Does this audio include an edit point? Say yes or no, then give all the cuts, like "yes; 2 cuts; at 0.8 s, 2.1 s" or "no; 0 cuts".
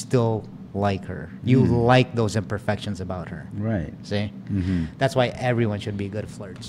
no; 0 cuts